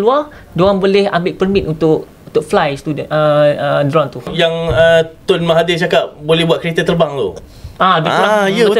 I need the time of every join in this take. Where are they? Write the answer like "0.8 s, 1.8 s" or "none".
4.3 s